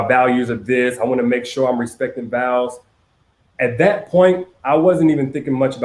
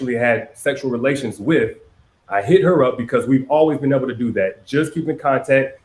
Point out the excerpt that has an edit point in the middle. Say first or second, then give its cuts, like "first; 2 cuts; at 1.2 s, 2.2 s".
first; 1 cut; at 4.9 s